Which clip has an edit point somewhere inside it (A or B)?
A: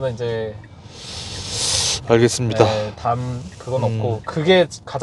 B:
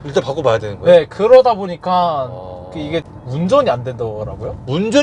B